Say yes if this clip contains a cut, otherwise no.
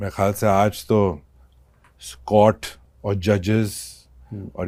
no